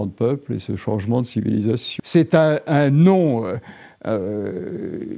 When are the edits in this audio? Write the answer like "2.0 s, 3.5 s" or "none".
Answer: 1.9 s